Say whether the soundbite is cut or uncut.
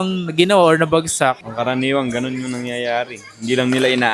cut